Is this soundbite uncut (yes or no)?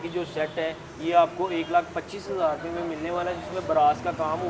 yes